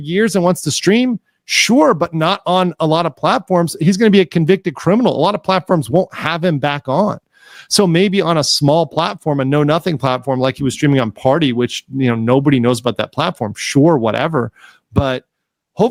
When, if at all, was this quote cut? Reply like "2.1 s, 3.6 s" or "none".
none

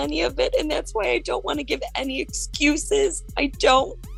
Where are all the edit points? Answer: none

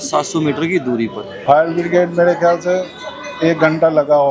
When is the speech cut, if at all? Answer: 1.3 s

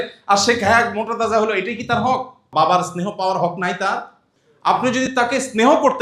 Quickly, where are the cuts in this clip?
2.4 s

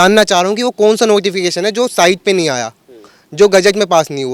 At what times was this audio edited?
none

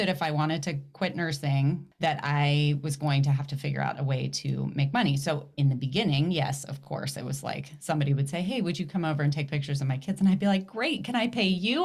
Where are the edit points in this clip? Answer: 1.9 s

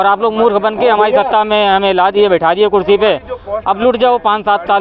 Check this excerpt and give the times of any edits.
none

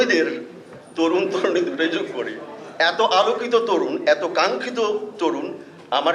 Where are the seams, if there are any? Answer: none

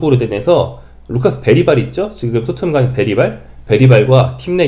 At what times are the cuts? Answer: none

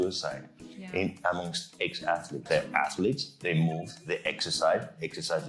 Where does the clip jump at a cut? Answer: 2.3 s

